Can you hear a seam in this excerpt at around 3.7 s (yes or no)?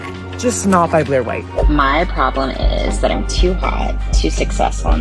no